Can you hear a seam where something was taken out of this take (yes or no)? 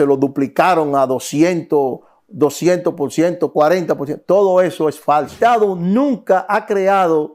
yes